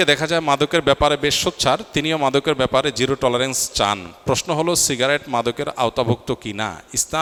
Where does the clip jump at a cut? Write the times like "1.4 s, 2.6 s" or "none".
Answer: none